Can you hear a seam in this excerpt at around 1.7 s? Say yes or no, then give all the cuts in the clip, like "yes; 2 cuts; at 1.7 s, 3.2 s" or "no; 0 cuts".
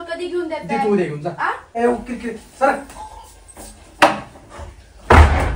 yes; 1 cut; at 1.7 s